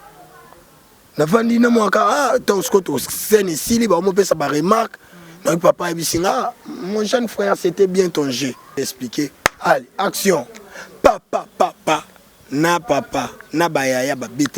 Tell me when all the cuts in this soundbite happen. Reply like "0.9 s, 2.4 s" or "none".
8.7 s